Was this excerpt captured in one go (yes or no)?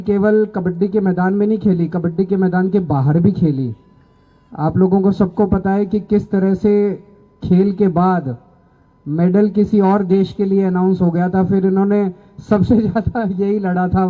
yes